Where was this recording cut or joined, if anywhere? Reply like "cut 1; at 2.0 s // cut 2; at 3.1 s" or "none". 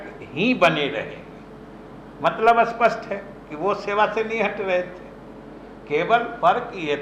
none